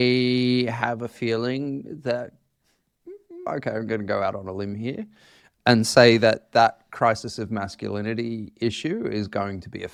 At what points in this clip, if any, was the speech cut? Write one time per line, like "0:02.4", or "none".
none